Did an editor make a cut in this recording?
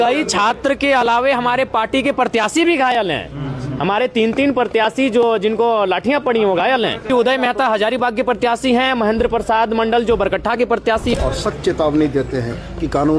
yes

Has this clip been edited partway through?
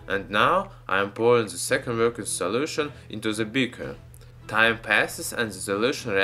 no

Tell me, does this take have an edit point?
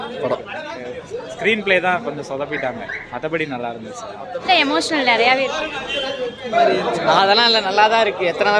yes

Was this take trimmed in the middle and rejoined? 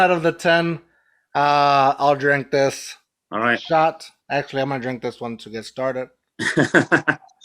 no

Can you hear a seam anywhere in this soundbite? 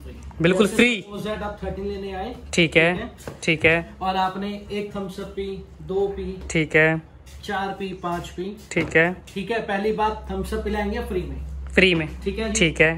no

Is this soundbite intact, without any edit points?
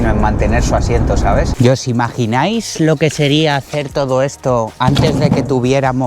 no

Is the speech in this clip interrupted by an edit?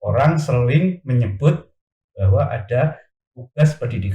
no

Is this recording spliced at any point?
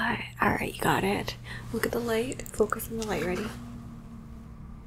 no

